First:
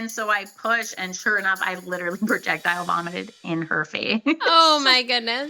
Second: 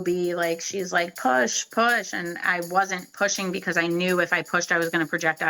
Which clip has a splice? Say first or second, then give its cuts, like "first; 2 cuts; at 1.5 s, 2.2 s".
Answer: first; 1 cut; at 4.5 s